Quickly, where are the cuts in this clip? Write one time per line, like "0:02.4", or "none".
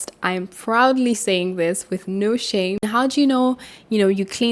0:02.8